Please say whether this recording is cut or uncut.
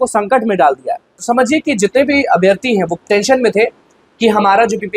cut